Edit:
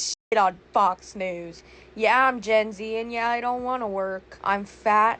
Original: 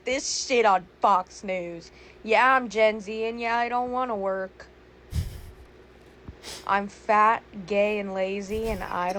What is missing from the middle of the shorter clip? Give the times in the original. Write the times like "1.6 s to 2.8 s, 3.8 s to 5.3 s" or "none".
4.6 s to 6.5 s

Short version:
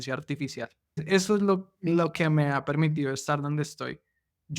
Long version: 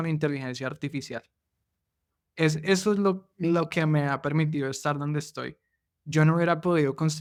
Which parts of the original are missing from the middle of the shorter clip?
1.5 s to 2.6 s

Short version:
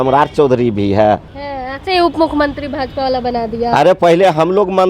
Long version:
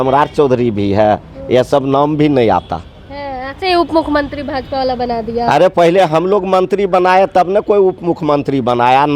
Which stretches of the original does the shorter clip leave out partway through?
1.3 s to 3.1 s

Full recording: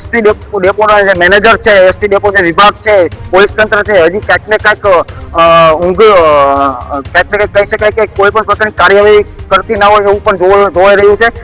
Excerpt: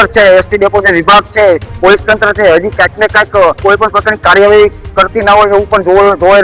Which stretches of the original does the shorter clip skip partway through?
5.1 s to 8.1 s

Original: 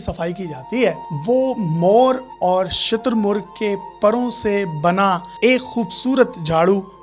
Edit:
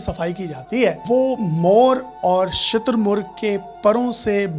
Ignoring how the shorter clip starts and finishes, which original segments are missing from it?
1.0 s to 1.2 s

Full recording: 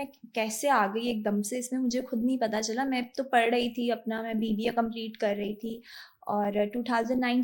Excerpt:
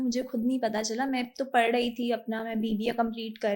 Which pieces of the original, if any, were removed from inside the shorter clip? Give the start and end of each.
none

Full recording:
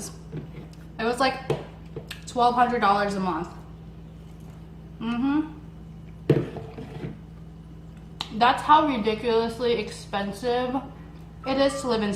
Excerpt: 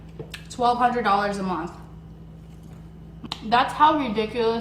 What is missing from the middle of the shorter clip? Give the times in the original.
5.0 s to 8.1 s

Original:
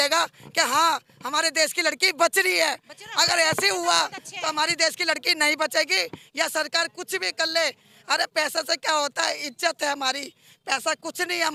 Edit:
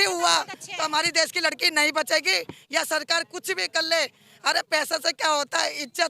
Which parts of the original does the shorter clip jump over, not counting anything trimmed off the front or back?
none

